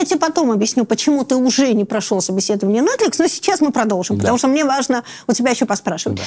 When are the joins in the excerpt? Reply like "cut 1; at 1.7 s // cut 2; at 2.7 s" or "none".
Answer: none